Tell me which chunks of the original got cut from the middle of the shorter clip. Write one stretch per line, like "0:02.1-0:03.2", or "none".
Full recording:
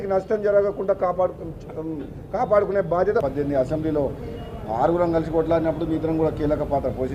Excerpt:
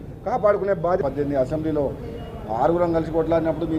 0:03.1-0:03.2